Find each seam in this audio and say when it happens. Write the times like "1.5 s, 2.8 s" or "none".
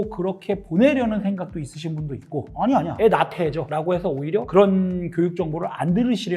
none